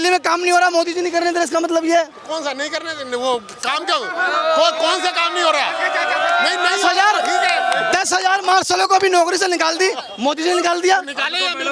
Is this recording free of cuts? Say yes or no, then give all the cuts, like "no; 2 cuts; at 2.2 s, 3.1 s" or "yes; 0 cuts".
yes; 0 cuts